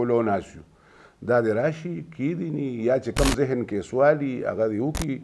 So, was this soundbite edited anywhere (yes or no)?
no